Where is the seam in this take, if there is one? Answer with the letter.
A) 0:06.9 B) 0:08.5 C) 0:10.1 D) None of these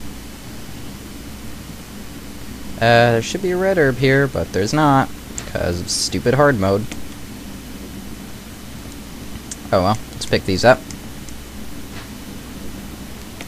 D